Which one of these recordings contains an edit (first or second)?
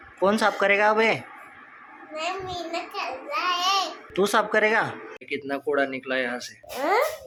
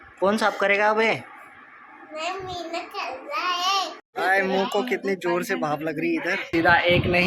second